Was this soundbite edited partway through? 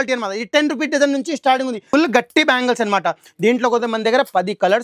yes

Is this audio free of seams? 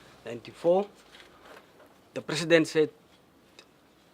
no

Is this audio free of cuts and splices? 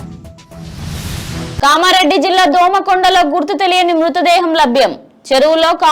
no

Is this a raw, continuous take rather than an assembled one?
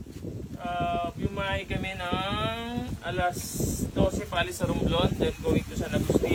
yes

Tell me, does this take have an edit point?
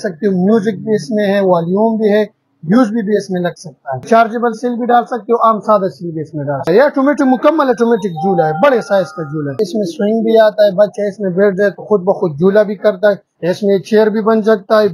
yes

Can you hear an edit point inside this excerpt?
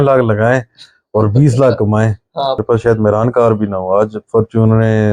yes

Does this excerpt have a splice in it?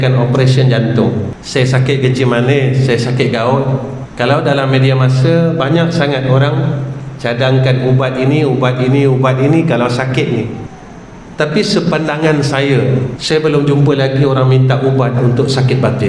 yes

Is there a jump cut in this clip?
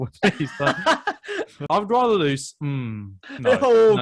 yes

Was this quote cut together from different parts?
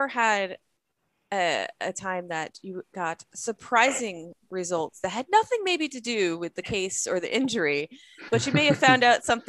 no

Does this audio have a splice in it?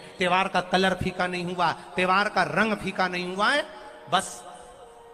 no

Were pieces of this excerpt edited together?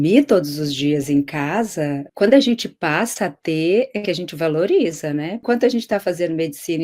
yes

